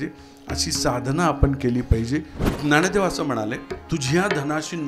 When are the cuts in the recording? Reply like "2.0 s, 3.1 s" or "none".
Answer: 2.4 s, 3.7 s